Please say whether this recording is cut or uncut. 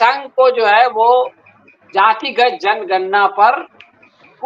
uncut